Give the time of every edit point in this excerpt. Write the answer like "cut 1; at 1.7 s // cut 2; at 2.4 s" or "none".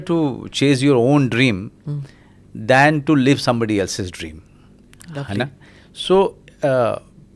none